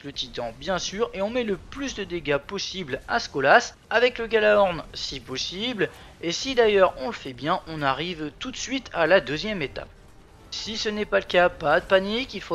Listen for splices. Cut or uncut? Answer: uncut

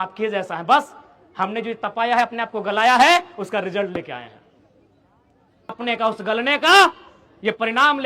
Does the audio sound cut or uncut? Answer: cut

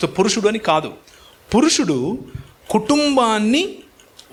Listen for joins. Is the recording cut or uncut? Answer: uncut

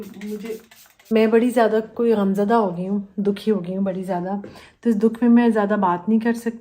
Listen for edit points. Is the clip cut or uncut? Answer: cut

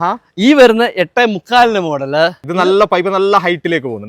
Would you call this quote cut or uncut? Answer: cut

